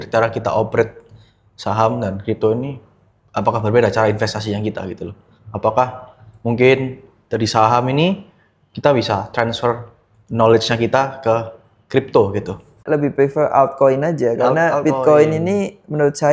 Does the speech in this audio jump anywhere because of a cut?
yes; 1 cut; at 12.8 s

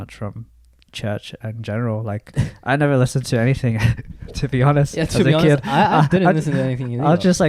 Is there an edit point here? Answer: no; 0 cuts

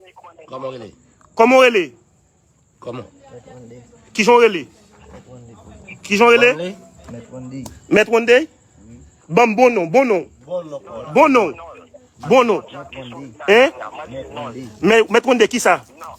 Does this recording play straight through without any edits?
yes; 0 cuts

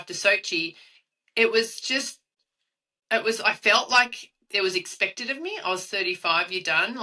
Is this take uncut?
yes; 0 cuts

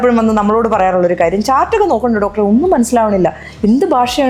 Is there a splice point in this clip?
no; 0 cuts

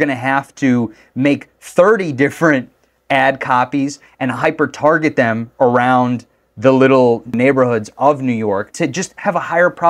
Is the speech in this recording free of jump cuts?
no; 2 cuts; at 7.3 s, 8.7 s

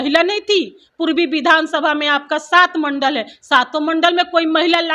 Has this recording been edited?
no; 0 cuts

